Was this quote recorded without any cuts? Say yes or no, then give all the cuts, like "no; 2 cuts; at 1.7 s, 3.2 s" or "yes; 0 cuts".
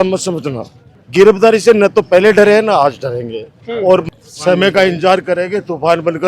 no; 2 cuts; at 1.0 s, 4.1 s